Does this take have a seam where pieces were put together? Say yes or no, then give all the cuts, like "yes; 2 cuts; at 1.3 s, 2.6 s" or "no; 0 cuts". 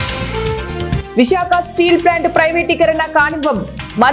yes; 1 cut; at 1.1 s